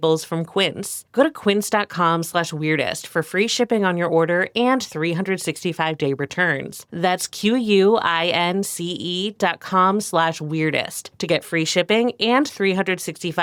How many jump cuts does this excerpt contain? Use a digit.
0